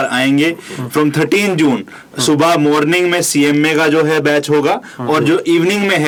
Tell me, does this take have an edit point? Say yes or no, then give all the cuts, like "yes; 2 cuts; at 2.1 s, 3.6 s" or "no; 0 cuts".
no; 0 cuts